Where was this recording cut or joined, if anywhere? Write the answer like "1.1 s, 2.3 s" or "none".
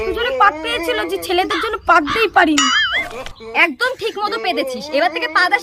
3.1 s